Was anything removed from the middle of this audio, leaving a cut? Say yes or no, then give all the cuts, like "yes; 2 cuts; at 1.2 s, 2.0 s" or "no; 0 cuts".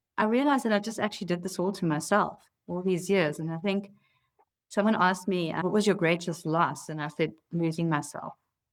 no; 0 cuts